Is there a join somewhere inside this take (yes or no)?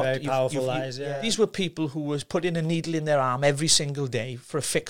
yes